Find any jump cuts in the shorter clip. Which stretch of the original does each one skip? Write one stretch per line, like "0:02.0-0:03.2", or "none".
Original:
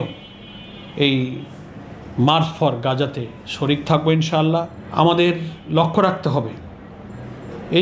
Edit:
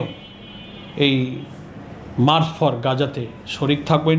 none